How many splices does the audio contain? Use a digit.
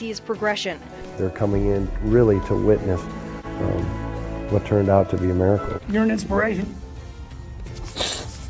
1